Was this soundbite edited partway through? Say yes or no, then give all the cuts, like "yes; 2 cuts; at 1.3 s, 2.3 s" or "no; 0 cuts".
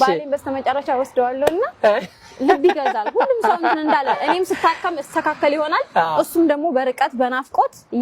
no; 0 cuts